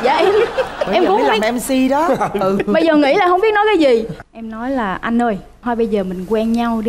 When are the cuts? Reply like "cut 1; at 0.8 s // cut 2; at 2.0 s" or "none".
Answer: cut 1; at 4.2 s